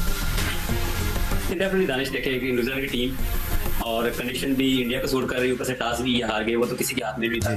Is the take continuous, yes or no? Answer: yes